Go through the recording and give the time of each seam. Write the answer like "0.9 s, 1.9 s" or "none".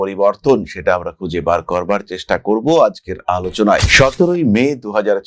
3.8 s